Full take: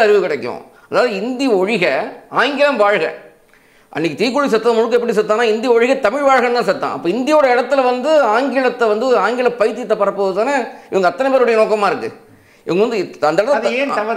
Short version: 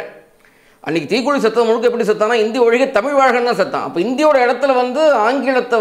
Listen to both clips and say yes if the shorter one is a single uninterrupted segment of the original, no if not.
yes